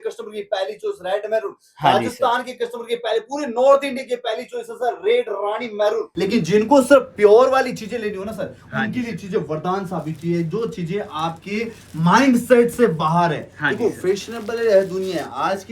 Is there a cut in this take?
yes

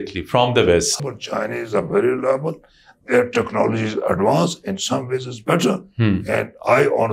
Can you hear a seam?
yes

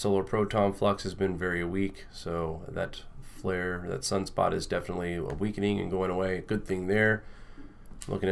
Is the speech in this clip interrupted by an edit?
yes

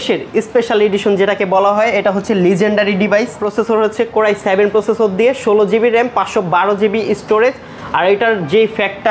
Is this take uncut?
yes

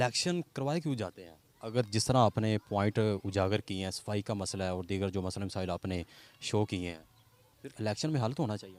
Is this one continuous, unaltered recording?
yes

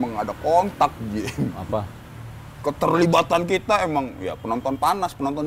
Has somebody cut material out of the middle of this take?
no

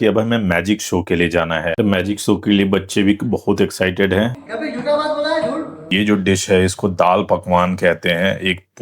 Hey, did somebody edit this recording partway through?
yes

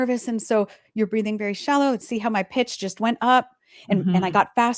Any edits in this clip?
yes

